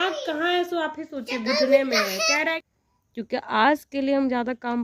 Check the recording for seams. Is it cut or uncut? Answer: cut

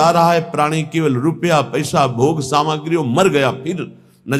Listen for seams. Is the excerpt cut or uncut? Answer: uncut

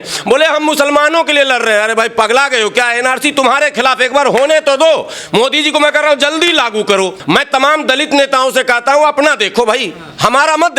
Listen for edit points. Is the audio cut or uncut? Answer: cut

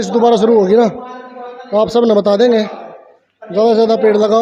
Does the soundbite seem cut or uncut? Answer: uncut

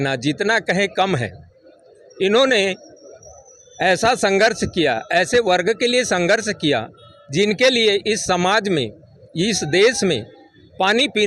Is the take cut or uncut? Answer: uncut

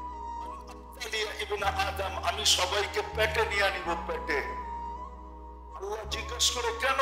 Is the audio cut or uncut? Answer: uncut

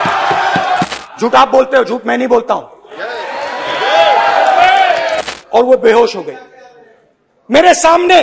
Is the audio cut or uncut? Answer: cut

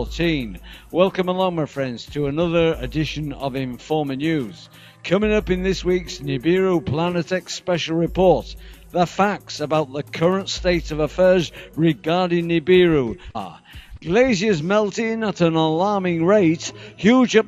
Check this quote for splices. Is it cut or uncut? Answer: uncut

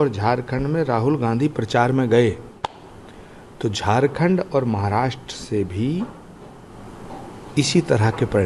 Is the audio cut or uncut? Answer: uncut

